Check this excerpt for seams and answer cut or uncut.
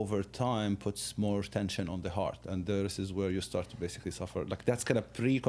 uncut